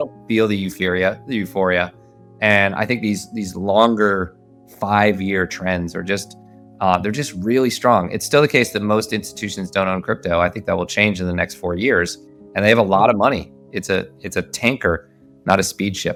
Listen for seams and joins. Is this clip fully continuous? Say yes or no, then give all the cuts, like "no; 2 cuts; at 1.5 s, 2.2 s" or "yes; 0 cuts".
yes; 0 cuts